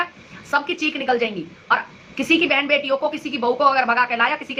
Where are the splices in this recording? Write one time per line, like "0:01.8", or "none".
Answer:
none